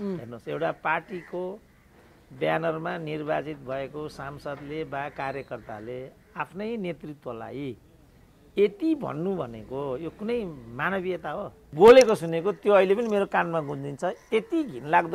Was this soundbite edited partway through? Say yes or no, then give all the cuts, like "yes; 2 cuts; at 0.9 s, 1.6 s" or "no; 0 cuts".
yes; 1 cut; at 11.7 s